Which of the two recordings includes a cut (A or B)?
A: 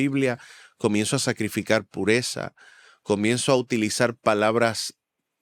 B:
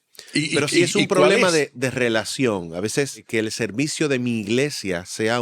B